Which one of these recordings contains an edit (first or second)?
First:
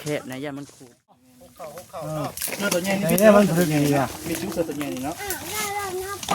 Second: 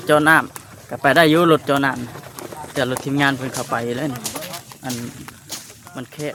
first